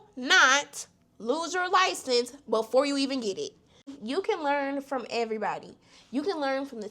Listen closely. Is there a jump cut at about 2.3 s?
no; 1 cut; at 3.9 s

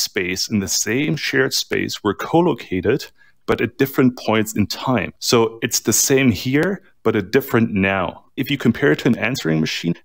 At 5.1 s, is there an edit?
yes; 2 cuts; at 5.1 s, 8.4 s

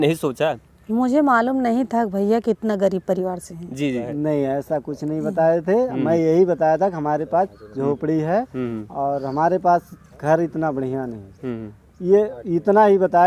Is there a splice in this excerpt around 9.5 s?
no; 1 cut; at 4.1 s

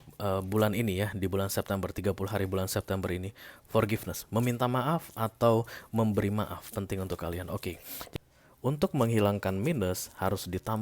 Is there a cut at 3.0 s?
no; 1 cut; at 7.9 s

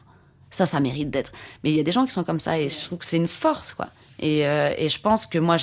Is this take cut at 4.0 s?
yes; 1 cut; at 4.0 s

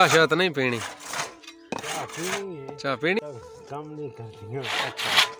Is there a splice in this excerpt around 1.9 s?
no; 1 cut; at 3.2 s

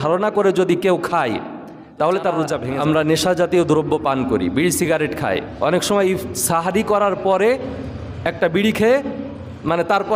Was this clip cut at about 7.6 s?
no; 1 cut; at 2.7 s

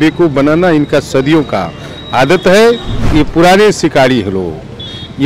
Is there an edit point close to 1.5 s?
no; 1 cut; at 2.9 s

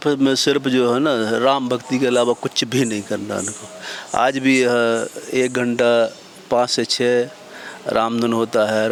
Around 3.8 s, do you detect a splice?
no; 0 cuts

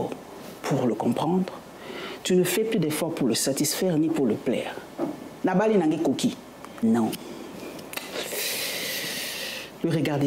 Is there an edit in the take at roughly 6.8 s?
yes; 1 cut; at 6.8 s

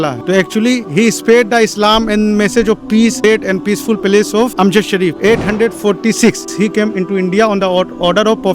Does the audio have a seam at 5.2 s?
yes; 3 cuts; at 3.2 s, 5.2 s, 6.5 s

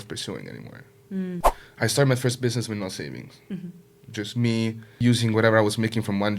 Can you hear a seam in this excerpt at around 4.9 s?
yes; 2 cuts; at 1.6 s, 4.9 s

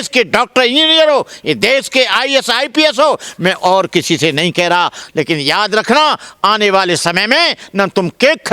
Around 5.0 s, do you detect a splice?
yes; 1 cut; at 5.0 s

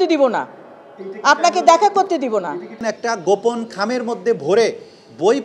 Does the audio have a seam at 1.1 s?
no; 1 cut; at 2.8 s

